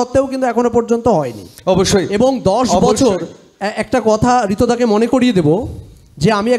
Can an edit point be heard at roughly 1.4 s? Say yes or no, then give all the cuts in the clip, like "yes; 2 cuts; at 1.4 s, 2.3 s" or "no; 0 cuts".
no; 0 cuts